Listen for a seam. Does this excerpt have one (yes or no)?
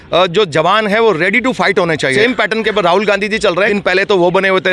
yes